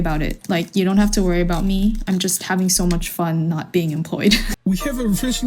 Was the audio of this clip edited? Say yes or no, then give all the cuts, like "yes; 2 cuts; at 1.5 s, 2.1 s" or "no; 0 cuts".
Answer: yes; 1 cut; at 4.5 s